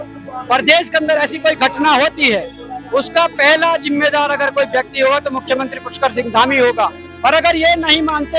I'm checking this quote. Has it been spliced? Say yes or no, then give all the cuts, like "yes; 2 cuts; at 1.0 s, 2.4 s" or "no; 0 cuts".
yes; 1 cut; at 7.0 s